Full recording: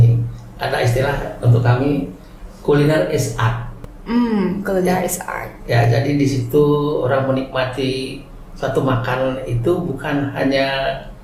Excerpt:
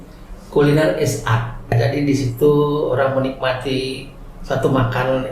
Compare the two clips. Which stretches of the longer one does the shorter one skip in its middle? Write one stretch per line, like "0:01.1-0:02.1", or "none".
0:03.9-0:05.9